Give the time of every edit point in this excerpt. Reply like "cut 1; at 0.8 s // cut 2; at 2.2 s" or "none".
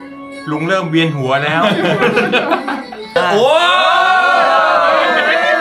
cut 1; at 3.1 s